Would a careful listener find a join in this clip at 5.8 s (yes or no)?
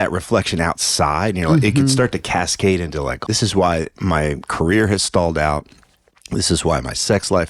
no